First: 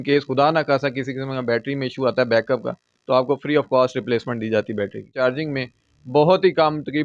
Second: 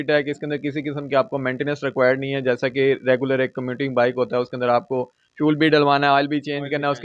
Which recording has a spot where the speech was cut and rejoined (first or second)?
first